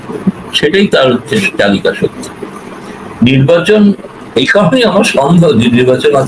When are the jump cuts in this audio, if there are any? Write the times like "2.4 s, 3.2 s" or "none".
2.6 s